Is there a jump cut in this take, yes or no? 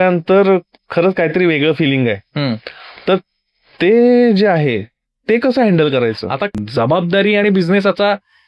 yes